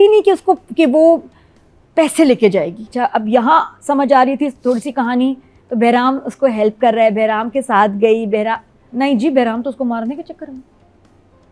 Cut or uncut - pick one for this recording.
cut